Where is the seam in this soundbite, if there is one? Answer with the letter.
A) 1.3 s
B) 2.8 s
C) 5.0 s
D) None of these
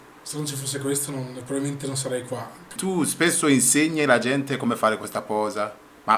B